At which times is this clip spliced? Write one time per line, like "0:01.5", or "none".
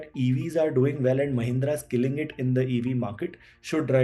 none